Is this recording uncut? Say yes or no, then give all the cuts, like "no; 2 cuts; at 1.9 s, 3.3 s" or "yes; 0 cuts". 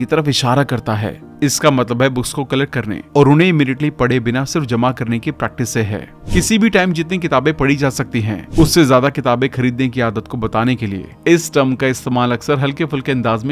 no; 1 cut; at 1.2 s